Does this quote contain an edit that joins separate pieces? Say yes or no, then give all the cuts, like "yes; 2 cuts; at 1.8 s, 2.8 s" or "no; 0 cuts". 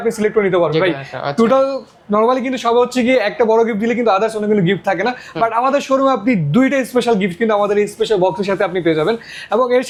no; 0 cuts